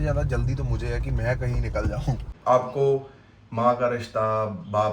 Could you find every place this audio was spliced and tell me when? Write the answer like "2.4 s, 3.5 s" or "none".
2.3 s